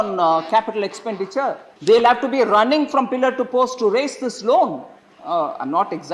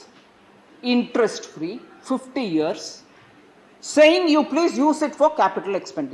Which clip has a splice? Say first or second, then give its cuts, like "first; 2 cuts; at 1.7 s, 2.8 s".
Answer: first; 1 cut; at 1.7 s